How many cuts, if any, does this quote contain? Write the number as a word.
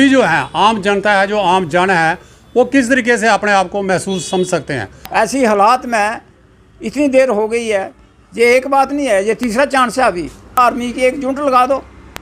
two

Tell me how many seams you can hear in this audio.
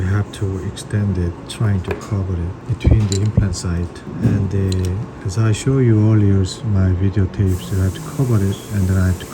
three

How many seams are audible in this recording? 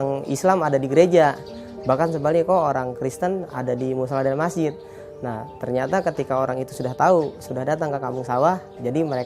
zero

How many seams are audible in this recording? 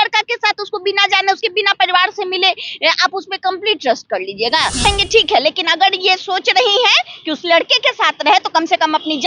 one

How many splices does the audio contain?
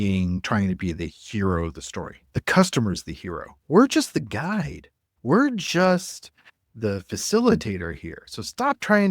one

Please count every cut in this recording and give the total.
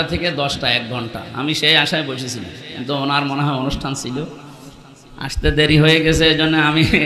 zero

